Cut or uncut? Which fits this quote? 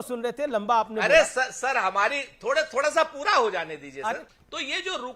cut